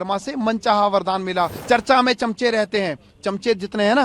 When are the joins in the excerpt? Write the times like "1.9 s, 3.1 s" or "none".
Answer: 1.6 s